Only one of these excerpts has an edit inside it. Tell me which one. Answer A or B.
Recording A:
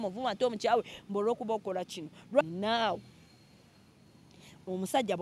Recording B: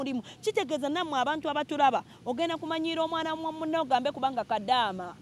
A